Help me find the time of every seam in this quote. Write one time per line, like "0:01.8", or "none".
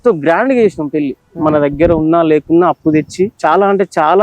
0:03.3